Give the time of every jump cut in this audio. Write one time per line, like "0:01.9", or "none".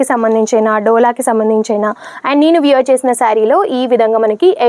none